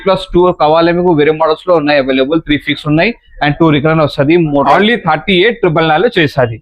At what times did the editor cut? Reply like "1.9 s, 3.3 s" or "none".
4.7 s